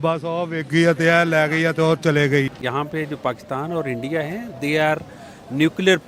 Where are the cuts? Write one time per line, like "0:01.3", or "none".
0:02.5